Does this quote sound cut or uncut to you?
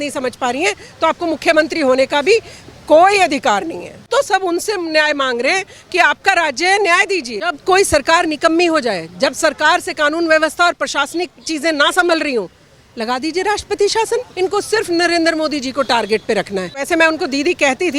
cut